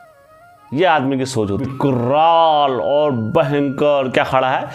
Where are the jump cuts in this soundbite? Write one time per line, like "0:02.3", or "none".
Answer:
0:01.6